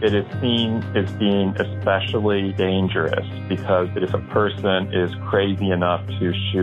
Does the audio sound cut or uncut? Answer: cut